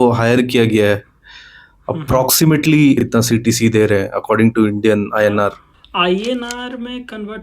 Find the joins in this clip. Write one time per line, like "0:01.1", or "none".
0:03.0
0:05.7